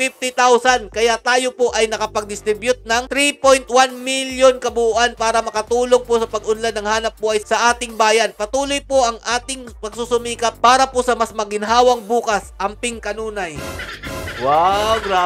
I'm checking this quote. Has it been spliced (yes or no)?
no